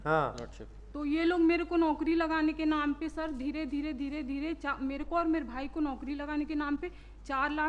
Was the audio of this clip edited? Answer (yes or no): no